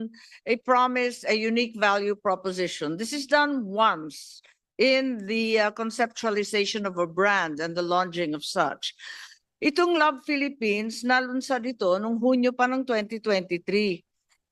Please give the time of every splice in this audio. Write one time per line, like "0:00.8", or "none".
none